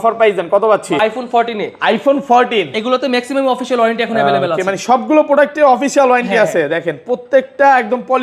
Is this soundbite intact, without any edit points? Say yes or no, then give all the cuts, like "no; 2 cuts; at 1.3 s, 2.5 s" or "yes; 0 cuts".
no; 1 cut; at 1.0 s